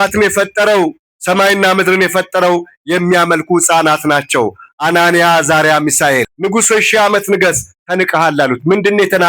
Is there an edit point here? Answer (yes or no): yes